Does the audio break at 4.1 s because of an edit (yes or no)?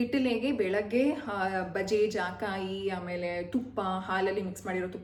no